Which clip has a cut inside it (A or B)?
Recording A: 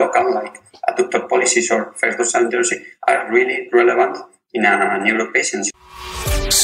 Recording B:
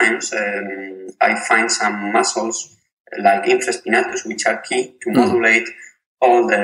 A